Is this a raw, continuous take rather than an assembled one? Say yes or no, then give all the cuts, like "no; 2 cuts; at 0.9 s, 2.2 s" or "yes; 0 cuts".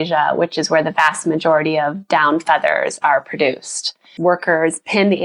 no; 1 cut; at 4.1 s